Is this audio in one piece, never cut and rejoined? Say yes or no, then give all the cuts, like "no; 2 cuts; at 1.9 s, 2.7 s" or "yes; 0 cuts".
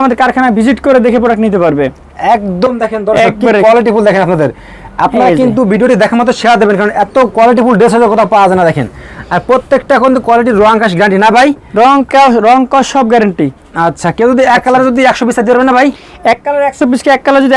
yes; 0 cuts